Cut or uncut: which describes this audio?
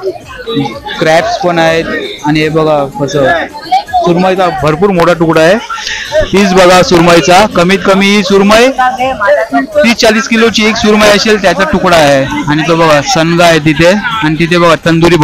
uncut